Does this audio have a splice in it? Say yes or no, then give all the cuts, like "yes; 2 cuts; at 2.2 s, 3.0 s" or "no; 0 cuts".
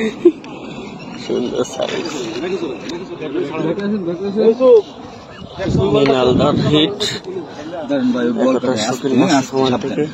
no; 0 cuts